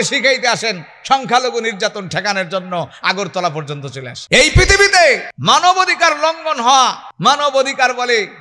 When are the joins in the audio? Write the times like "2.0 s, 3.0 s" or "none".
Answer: 4.1 s, 5.3 s, 7.1 s